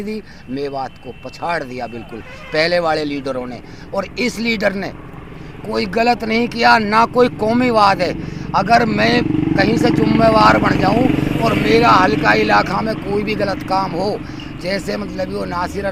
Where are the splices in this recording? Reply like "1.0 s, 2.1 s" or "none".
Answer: none